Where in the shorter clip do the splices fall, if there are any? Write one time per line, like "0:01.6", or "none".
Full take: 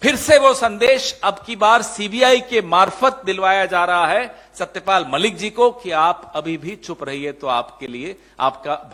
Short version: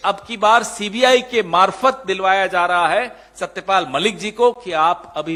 none